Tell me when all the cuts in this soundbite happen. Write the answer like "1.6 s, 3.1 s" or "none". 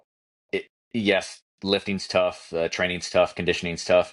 none